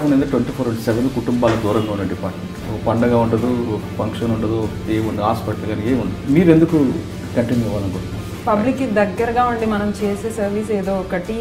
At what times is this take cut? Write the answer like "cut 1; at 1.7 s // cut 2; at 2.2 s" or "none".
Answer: cut 1; at 6.1 s // cut 2; at 8.3 s